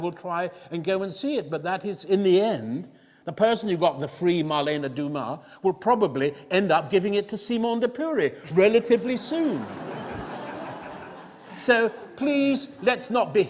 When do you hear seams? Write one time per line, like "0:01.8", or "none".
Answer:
none